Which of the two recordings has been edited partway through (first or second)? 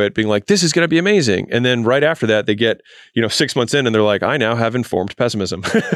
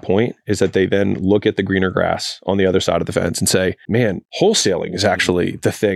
second